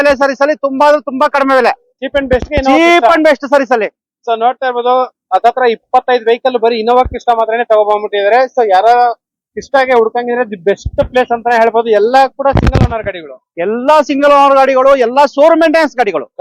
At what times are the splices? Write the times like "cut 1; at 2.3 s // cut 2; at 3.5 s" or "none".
none